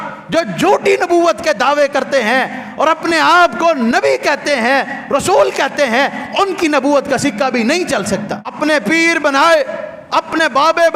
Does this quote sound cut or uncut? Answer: cut